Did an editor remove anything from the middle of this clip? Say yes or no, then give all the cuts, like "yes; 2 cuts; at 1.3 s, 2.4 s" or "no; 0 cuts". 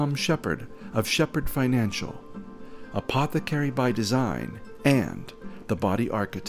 no; 0 cuts